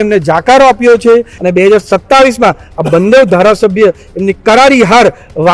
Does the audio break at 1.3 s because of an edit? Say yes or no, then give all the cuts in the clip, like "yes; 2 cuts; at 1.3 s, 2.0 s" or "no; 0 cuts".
yes; 1 cut; at 1.3 s